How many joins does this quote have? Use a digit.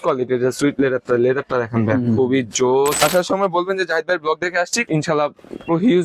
2